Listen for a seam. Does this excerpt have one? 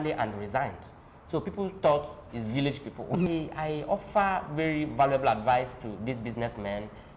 yes; 1 cut; at 3.3 s

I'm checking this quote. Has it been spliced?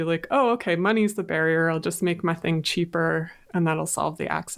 no; 0 cuts

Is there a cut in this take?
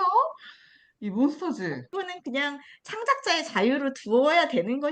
yes; 1 cut; at 2.0 s

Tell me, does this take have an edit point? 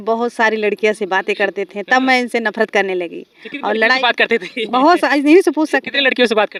no; 0 cuts

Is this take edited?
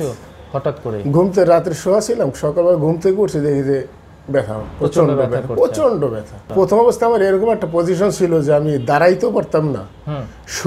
yes; 1 cut; at 6.4 s

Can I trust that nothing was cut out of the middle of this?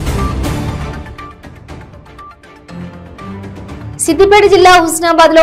yes; 0 cuts

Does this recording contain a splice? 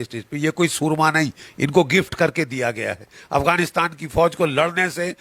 no; 0 cuts

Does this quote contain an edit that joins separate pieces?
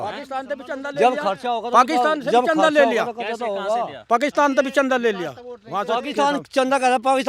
no; 0 cuts

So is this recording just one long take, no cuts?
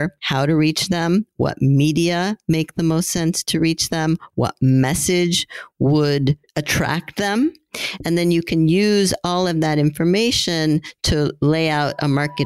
yes; 0 cuts

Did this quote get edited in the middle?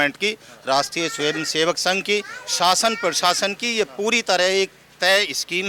no; 0 cuts

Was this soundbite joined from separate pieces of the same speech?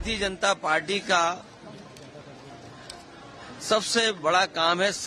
no; 0 cuts

